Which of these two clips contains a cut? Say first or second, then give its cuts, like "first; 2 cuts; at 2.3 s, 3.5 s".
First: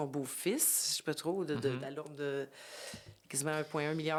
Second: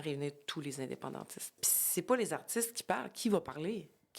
second; 1 cut; at 1.6 s